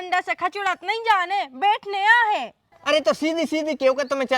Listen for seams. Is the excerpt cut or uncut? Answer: cut